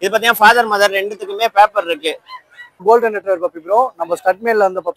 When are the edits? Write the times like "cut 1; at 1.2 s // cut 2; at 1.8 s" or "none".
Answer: cut 1; at 2.8 s